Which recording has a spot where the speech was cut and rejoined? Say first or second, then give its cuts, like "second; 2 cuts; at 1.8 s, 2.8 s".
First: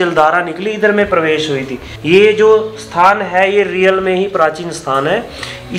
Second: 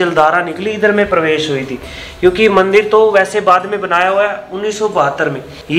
first; 1 cut; at 1.9 s